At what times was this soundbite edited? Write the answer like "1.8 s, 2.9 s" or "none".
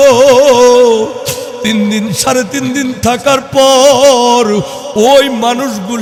none